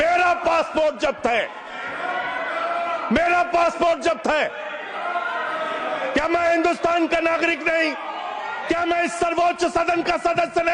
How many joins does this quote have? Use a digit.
0